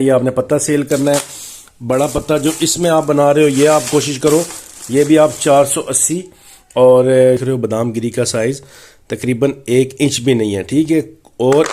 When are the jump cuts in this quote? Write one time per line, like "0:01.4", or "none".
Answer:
0:07.4

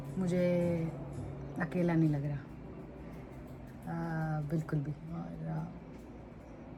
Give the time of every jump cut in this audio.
none

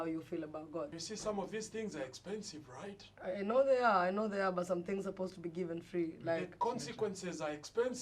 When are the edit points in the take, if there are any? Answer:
0:00.9

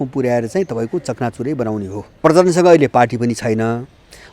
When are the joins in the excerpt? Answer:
0:02.2

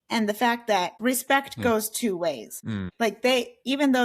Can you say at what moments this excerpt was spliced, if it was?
0:00.9
0:02.8

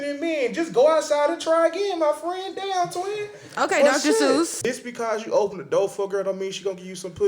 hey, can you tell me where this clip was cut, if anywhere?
0:04.6

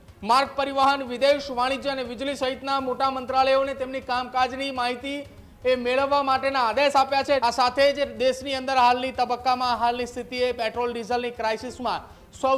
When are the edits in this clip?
0:07.4

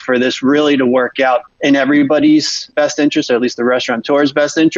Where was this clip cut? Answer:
0:01.5
0:02.7

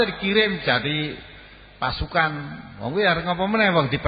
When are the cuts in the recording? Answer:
none

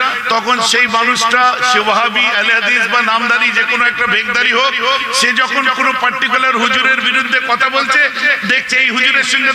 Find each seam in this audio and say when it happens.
none

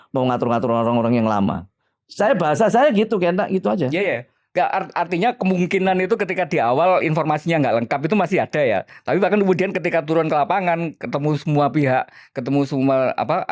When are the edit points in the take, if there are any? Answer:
none

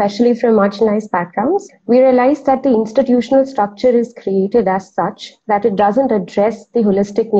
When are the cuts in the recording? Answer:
0:01.6

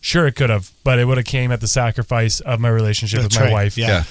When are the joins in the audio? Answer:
none

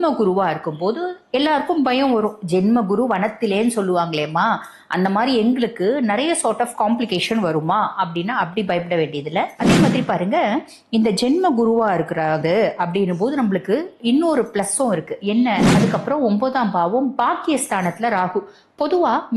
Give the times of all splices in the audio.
0:09.6
0:15.7

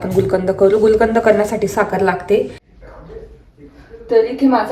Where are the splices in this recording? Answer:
0:02.9

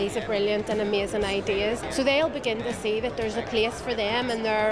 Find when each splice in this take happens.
0:01.8

